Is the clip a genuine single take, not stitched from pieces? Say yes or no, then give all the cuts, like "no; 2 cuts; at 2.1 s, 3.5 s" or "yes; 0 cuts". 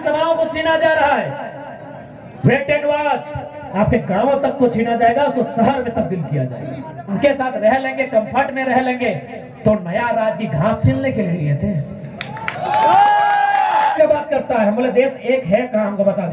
no; 2 cuts; at 7.0 s, 14.0 s